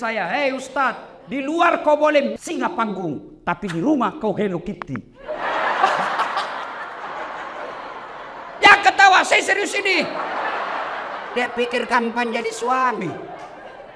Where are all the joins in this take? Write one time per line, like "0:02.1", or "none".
0:07.0